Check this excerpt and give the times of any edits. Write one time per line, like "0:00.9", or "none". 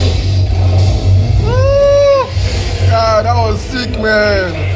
none